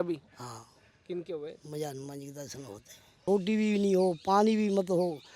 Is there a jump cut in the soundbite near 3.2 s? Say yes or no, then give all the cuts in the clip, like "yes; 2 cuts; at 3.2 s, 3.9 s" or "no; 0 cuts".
yes; 1 cut; at 3.2 s